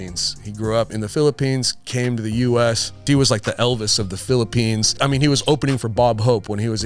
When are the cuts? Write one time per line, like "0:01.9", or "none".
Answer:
0:00.9
0:02.9
0:05.0

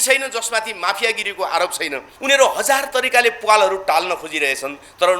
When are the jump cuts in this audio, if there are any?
0:02.1

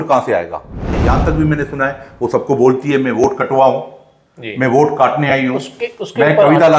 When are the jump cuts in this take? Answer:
0:01.0

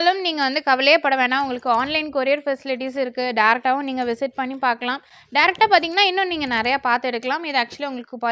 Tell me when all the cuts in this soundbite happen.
none

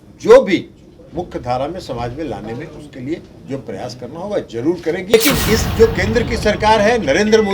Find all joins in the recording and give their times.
0:05.1

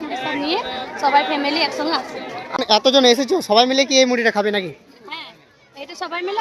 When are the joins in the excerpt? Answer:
0:02.6

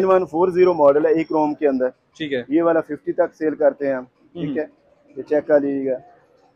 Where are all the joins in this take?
none

